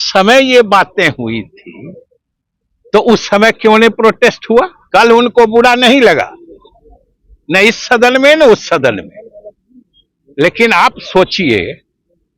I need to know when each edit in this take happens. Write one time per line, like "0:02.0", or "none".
0:04.8